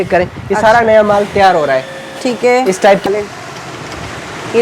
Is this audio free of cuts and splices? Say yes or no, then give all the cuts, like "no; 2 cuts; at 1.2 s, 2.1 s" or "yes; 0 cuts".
no; 1 cut; at 3.0 s